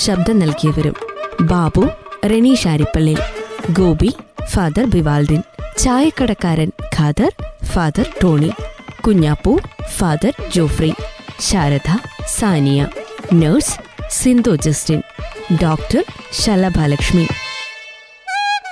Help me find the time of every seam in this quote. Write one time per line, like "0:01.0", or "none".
0:17.3